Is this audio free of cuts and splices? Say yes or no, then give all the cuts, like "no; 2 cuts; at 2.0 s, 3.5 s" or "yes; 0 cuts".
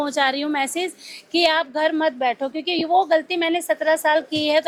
yes; 0 cuts